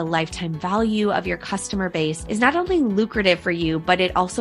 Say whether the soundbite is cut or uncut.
cut